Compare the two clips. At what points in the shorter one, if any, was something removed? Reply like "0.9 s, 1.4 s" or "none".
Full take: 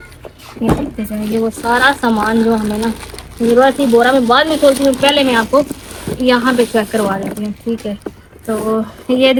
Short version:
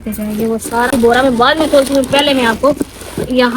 0.9 s